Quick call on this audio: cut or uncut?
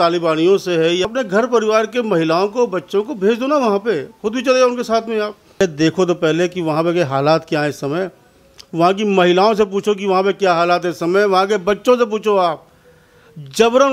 cut